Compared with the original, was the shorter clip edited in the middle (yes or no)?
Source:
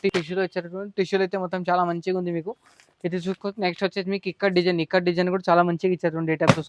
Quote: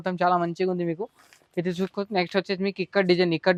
no